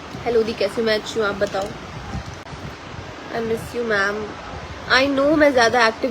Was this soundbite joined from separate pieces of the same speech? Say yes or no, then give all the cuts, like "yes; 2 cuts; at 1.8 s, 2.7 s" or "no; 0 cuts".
yes; 1 cut; at 2.4 s